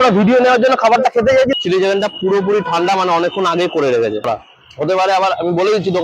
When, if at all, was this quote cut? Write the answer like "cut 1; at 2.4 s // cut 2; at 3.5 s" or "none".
cut 1; at 1.5 s // cut 2; at 4.3 s

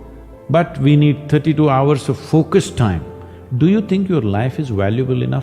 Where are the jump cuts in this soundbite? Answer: none

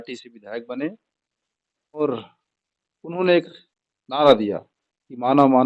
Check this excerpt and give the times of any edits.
cut 1; at 2.0 s

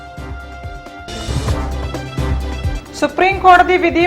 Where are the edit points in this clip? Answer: cut 1; at 2.8 s

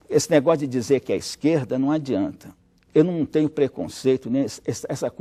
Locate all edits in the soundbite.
none

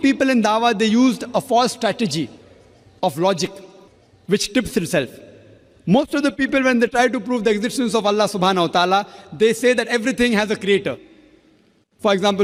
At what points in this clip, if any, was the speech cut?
none

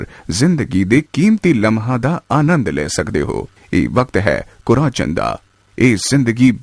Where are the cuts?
cut 1; at 3.5 s

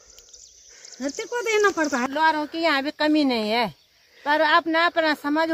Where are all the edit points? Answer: cut 1; at 2.1 s

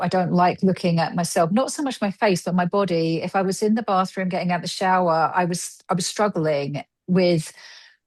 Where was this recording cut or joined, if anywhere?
none

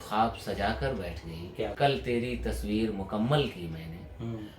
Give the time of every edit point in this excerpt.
cut 1; at 1.7 s

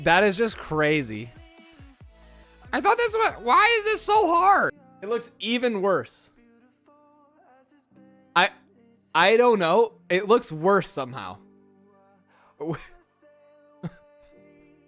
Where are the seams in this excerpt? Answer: cut 1; at 4.9 s

